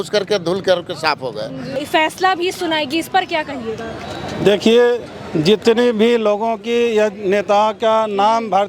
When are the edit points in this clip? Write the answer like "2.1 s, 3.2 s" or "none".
1.6 s